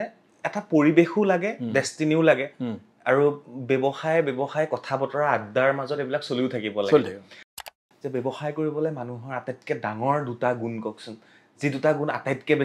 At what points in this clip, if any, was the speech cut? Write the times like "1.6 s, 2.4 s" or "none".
7.6 s